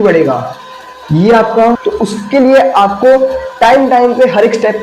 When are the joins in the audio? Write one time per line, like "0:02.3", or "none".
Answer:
0:01.8

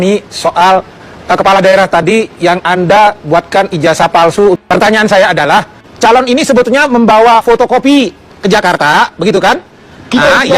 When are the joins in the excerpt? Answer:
0:05.8

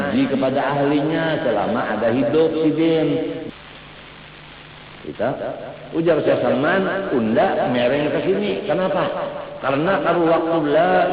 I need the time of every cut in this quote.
0:03.4

